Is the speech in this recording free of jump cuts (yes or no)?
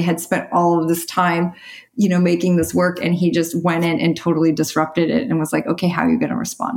yes